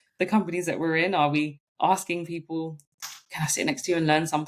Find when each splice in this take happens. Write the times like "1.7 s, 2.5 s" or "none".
1.6 s